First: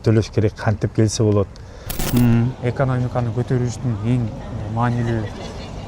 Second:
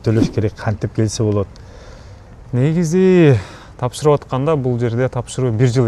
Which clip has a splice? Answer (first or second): first